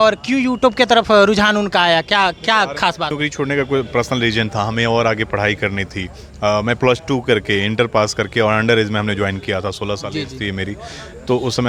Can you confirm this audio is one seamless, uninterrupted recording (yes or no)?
yes